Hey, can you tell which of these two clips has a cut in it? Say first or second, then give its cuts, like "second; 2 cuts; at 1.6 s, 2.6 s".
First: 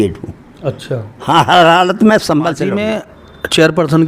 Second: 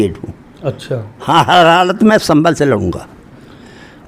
first; 1 cut; at 2.8 s